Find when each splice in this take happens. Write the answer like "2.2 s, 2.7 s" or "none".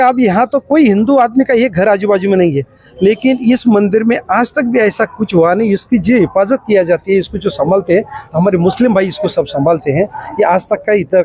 none